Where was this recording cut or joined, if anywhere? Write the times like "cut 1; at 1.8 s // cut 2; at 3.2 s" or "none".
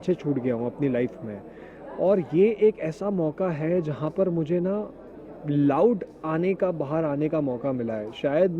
none